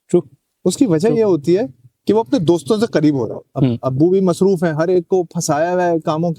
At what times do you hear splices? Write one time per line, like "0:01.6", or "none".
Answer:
0:03.4